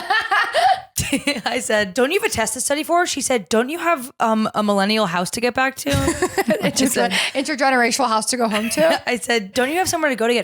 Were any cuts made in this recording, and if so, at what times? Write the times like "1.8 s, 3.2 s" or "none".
1.9 s, 9.5 s